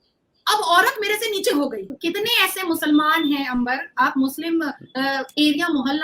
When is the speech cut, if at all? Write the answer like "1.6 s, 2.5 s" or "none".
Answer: 1.9 s

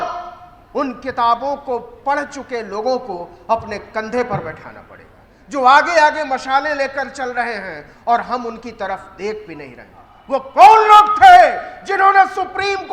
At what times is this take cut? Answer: 5.3 s, 10.1 s

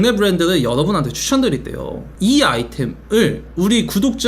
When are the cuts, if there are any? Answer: 2.0 s

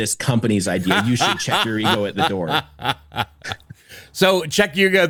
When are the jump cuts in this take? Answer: none

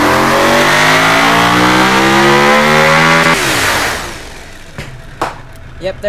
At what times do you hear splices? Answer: none

